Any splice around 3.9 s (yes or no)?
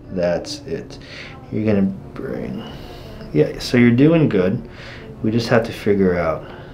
no